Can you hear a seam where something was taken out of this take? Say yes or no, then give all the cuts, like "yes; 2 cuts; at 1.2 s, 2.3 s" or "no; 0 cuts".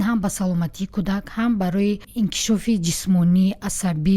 yes; 1 cut; at 2.1 s